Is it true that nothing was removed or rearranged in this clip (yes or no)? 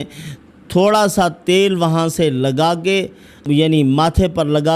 no